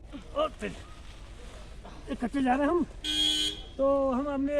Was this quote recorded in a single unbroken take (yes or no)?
yes